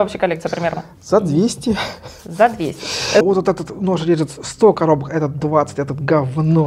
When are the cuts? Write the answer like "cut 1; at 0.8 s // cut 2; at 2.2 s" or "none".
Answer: cut 1; at 3.2 s